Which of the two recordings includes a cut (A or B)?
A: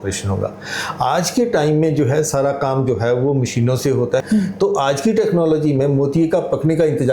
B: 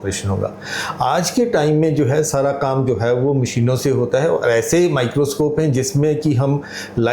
A